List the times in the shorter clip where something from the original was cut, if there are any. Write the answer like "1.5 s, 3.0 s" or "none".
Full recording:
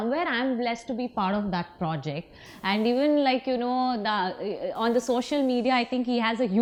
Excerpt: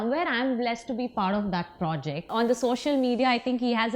2.3 s

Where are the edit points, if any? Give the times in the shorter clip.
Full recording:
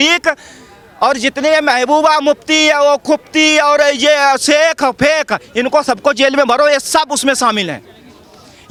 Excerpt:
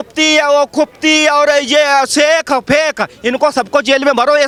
none

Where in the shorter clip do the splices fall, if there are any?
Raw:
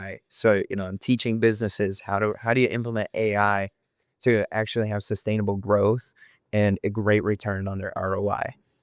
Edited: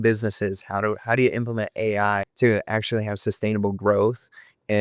2.3 s

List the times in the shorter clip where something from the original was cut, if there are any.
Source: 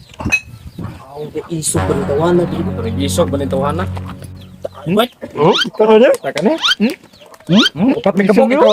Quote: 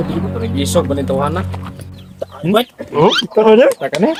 none

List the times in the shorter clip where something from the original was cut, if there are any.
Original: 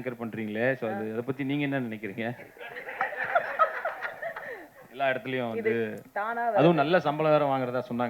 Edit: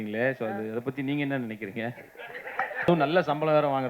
2.9 s

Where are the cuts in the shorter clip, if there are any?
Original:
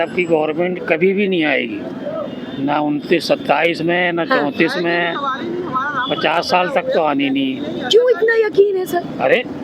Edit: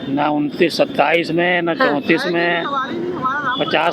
none

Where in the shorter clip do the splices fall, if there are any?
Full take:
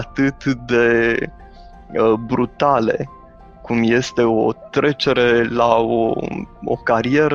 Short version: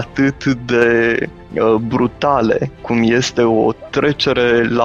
1.4 s, 2.7 s

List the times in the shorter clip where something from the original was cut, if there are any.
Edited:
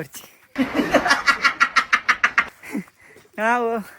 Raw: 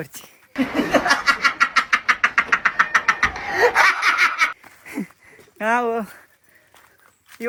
2.5 s

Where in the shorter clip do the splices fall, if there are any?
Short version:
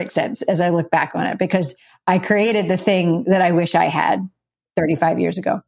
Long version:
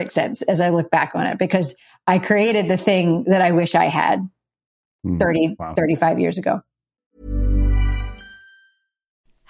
4.6 s

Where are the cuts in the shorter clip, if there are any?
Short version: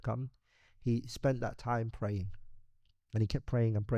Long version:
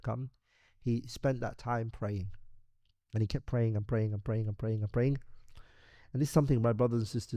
none

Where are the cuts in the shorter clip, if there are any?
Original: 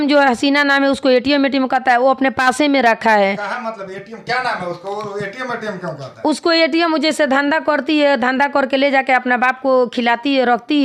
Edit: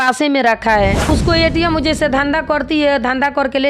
1.0 s

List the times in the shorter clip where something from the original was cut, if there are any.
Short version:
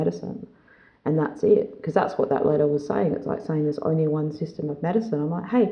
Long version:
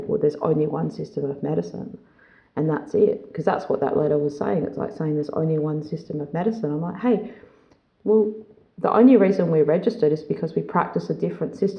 none

